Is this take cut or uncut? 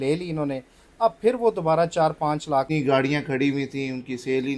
cut